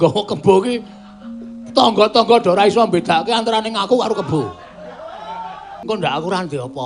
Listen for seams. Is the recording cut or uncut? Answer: cut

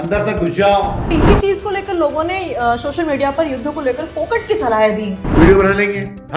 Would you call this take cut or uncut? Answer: cut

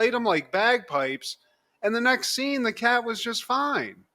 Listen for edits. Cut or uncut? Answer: uncut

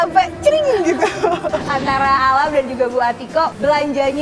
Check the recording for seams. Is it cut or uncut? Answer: cut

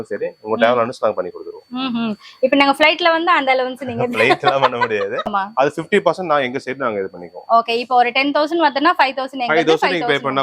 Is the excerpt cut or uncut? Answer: cut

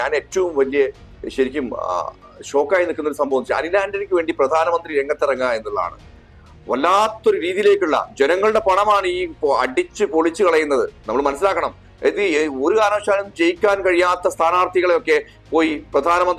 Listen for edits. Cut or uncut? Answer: uncut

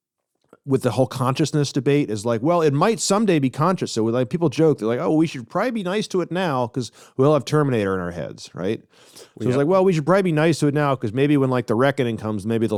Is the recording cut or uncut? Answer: uncut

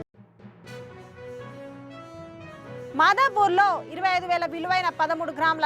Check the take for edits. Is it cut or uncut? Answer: uncut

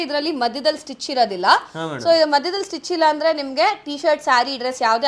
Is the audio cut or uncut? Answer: uncut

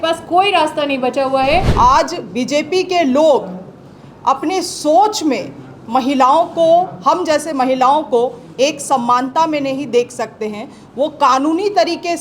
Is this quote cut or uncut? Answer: cut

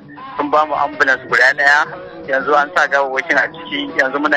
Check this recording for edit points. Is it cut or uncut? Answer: uncut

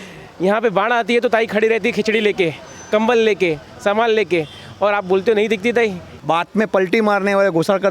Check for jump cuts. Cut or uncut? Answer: cut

